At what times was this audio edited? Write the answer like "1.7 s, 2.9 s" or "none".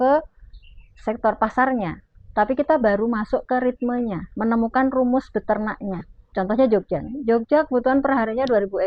6.3 s